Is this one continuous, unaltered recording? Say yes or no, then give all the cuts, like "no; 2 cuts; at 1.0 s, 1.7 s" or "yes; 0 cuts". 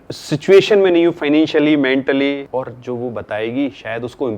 no; 1 cut; at 2.4 s